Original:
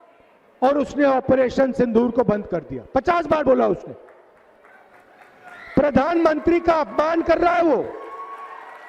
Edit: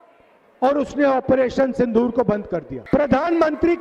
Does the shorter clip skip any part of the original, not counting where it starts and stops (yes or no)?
yes